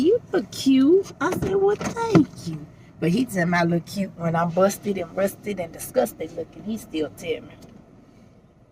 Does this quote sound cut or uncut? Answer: uncut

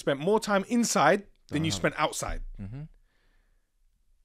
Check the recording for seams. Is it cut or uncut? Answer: uncut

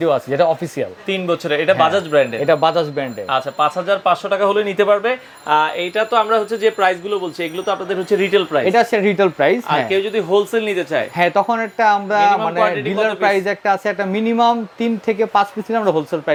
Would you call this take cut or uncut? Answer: uncut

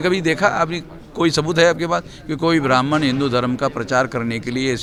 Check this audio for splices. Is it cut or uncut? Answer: uncut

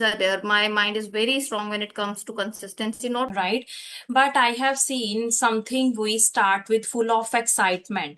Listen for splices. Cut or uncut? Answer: cut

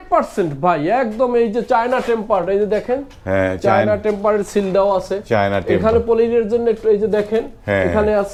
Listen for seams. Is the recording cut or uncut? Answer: uncut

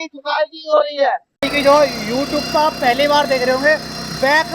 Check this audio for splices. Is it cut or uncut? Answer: cut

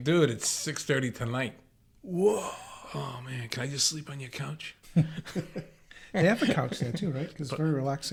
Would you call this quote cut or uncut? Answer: uncut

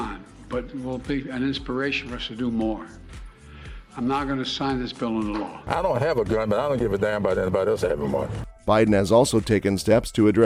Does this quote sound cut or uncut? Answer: uncut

